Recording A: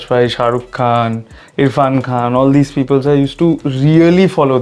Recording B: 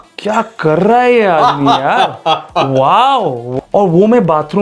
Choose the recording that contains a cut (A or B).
B